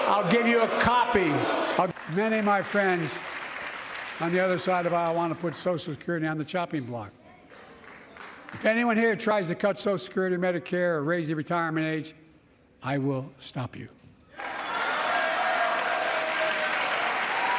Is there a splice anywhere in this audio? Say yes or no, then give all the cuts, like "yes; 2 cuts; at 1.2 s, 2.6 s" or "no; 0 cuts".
yes; 1 cut; at 1.9 s